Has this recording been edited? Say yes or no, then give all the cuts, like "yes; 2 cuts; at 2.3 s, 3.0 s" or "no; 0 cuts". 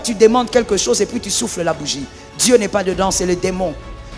no; 0 cuts